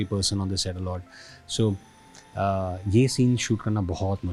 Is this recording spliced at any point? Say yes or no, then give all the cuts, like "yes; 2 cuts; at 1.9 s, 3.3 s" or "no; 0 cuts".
no; 0 cuts